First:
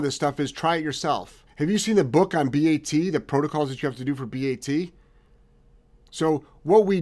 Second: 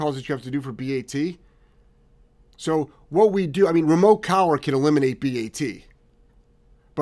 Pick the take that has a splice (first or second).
first